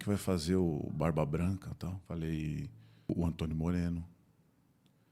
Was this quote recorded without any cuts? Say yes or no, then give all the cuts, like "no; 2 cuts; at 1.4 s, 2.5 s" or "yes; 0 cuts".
no; 2 cuts; at 2.0 s, 3.1 s